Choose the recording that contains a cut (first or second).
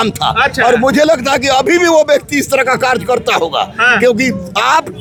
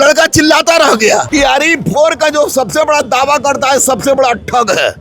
second